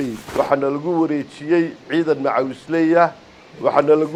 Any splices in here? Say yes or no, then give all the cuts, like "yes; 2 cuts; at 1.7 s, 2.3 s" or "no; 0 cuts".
no; 0 cuts